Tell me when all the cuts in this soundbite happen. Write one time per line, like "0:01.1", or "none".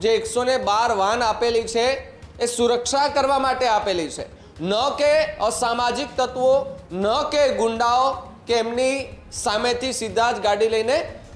none

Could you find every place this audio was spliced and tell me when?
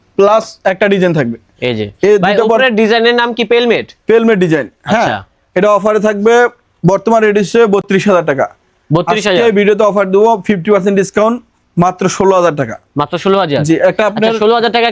none

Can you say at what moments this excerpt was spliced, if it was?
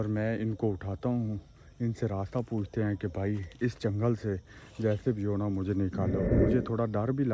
0:06.3

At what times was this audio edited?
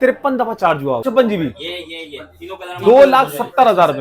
0:01.0

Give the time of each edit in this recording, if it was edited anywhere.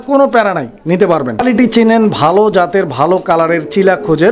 0:01.4

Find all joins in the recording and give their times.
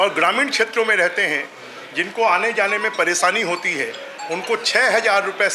none

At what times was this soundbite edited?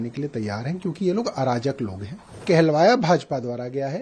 0:02.4

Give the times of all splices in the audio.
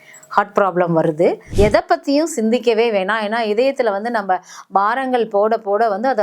0:01.4

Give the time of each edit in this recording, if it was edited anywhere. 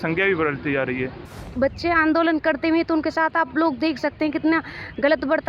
0:01.3

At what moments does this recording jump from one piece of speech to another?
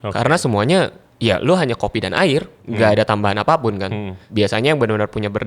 0:02.6
0:04.2

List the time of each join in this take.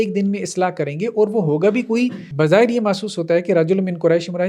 0:02.2

